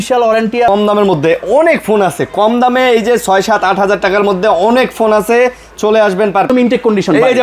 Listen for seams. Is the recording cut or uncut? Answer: cut